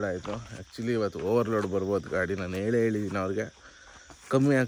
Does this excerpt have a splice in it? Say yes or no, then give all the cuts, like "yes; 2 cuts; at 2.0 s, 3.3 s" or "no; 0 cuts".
no; 0 cuts